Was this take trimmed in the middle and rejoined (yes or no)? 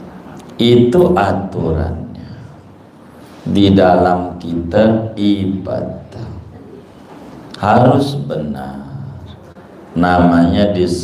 no